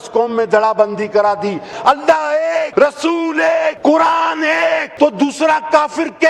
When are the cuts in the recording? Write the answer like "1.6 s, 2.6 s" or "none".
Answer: 1.7 s, 2.7 s, 3.8 s, 4.9 s